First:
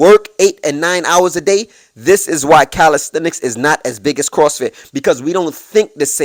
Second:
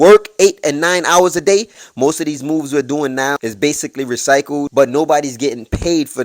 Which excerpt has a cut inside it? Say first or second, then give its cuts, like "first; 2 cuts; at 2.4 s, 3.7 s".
second; 3 cuts; at 1.8 s, 3.4 s, 4.7 s